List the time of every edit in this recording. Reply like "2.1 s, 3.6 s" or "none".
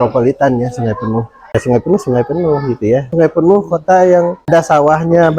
1.5 s, 3.1 s, 4.5 s